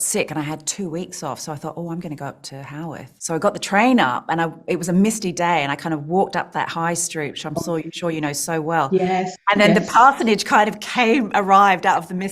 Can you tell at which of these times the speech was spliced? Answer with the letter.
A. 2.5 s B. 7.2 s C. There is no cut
A